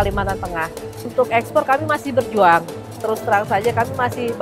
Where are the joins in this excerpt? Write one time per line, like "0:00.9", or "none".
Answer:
0:01.1